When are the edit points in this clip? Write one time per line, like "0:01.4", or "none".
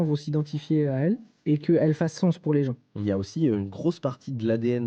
0:01.3
0:03.0